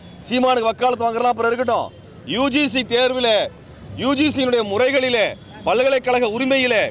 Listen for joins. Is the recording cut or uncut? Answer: uncut